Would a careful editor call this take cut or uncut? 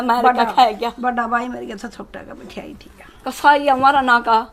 uncut